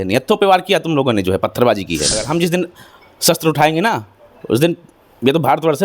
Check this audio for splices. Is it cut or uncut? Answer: cut